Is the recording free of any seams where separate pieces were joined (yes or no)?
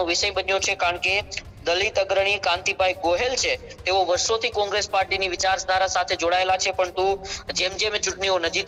yes